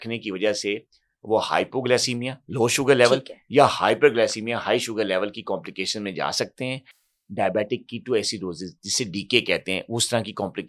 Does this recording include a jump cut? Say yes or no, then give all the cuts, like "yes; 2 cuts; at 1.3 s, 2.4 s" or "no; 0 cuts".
no; 0 cuts